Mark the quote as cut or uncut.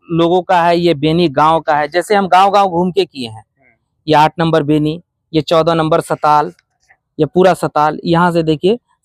uncut